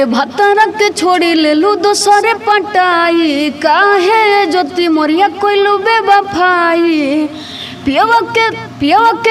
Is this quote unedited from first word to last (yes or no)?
yes